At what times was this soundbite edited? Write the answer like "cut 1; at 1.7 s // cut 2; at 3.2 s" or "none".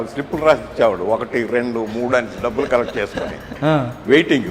none